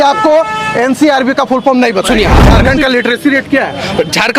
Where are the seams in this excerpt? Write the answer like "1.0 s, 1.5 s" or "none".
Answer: 2.4 s